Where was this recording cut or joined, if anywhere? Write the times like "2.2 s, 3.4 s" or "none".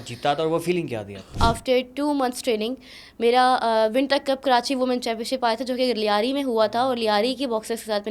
1.3 s